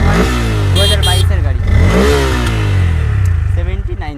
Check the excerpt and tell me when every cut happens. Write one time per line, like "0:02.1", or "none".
none

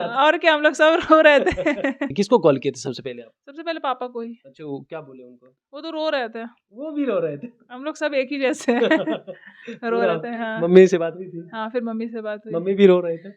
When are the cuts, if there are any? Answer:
0:02.1

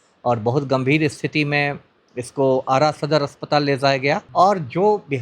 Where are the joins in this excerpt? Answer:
0:04.2

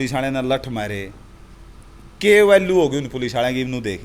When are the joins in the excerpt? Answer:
none

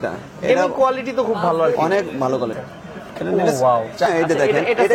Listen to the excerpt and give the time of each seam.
0:02.5
0:04.1

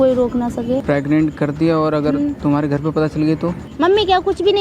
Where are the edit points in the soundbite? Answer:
0:00.8
0:03.7

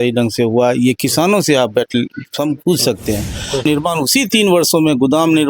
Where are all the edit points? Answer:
0:03.6

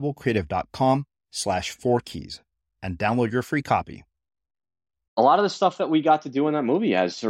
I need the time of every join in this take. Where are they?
0:05.2

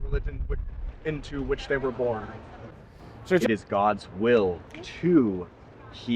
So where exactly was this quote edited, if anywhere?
0:03.4

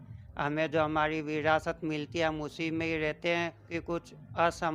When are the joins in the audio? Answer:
0:03.7

